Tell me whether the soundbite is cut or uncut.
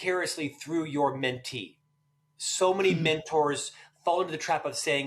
uncut